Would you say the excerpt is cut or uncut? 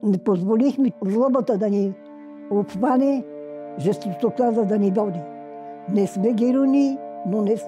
cut